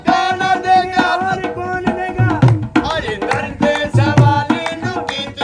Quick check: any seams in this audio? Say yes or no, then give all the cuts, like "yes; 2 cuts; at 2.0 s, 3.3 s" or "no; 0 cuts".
no; 0 cuts